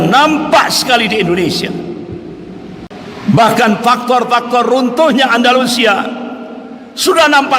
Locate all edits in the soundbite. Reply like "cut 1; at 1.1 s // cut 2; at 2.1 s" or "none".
cut 1; at 2.9 s